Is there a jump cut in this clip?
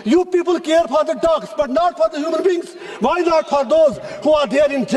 no; 0 cuts

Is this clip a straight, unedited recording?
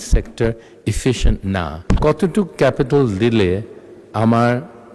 no; 1 cut; at 1.7 s

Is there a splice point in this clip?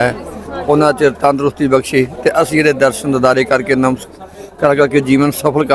no; 0 cuts

